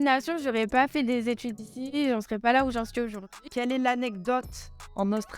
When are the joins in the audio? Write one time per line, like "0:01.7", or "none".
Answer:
0:03.4